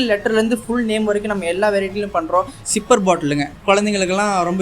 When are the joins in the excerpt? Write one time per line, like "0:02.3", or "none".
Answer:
0:02.6